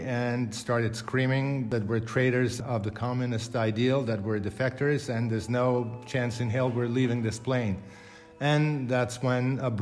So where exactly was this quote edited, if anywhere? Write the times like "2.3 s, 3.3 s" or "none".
1.7 s, 2.6 s

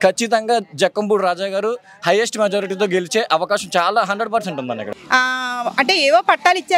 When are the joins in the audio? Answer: 4.9 s

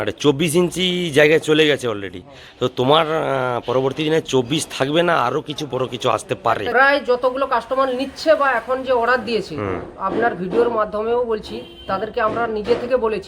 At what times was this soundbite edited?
6.7 s

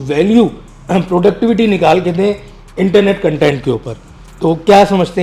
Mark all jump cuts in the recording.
none

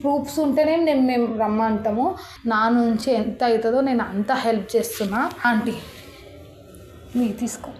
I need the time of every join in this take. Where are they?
2.3 s

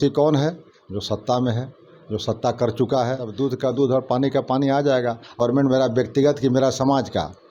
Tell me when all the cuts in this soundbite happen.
3.3 s, 5.4 s

